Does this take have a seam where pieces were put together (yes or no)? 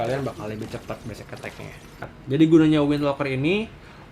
yes